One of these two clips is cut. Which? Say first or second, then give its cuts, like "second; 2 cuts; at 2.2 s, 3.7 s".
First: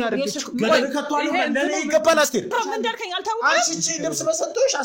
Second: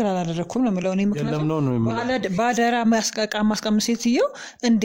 first; 1 cut; at 2.5 s